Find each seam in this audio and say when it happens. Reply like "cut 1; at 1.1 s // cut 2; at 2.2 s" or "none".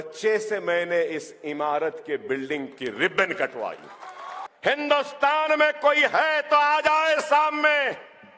cut 1; at 4.4 s